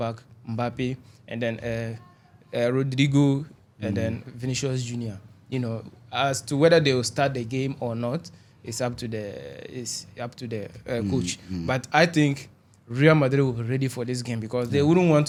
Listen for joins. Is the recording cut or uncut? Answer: uncut